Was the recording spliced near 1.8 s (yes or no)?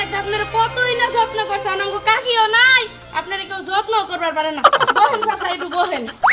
no